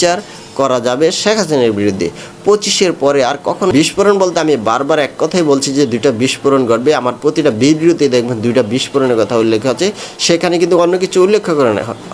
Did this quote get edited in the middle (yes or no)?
yes